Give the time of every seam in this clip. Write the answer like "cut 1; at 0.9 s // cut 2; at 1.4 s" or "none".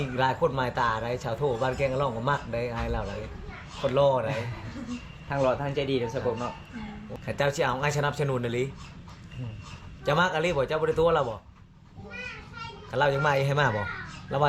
cut 1; at 7.0 s